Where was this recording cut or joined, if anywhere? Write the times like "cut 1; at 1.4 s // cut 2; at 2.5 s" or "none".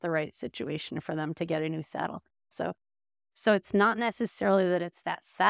cut 1; at 2.5 s